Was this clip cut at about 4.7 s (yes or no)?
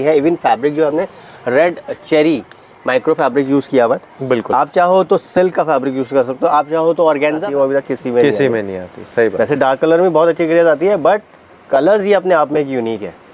no